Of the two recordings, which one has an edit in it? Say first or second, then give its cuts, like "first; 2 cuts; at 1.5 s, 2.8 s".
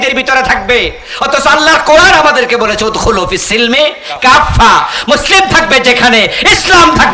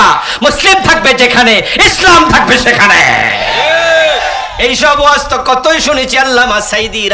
second; 1 cut; at 4.5 s